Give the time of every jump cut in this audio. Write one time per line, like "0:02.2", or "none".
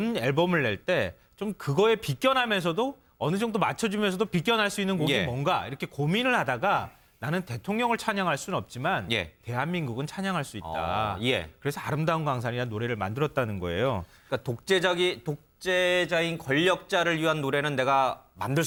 none